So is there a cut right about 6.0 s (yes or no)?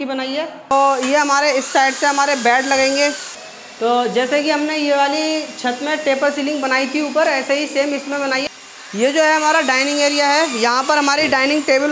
no